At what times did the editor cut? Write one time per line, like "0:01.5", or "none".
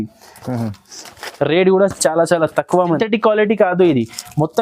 0:03.0